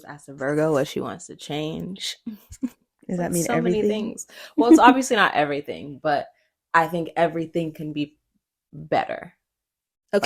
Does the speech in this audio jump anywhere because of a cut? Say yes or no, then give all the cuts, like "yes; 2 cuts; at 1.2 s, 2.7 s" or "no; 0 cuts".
no; 0 cuts